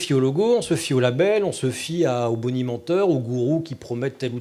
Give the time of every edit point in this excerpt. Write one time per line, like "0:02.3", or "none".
none